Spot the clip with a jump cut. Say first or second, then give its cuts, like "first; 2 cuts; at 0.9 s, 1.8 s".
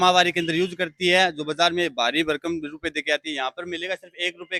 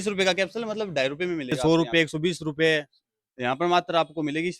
second; 1 cut; at 1.6 s